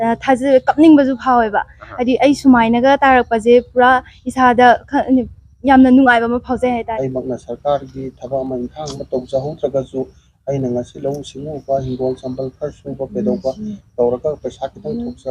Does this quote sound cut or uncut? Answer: cut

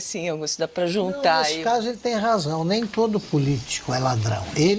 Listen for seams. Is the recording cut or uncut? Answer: uncut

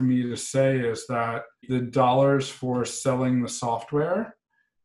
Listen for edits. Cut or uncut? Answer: uncut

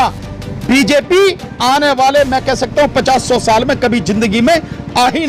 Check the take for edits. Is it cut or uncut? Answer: uncut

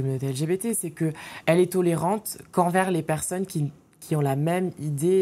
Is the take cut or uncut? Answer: uncut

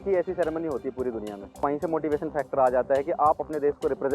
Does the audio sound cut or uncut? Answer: cut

